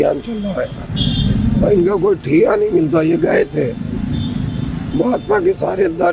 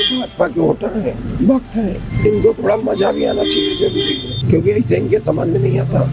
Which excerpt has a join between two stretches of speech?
second; 2 cuts; at 2.1 s, 4.3 s

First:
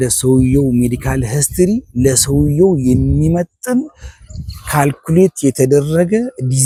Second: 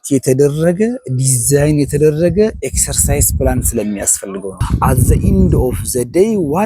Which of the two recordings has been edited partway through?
second; 1 cut; at 4.6 s

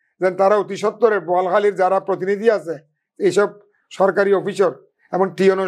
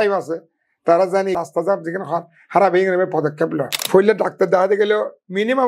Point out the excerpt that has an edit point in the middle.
second; 2 cuts; at 1.4 s, 3.7 s

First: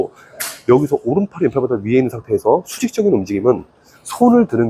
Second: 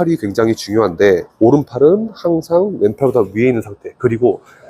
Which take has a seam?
second; 1 cut; at 1.3 s

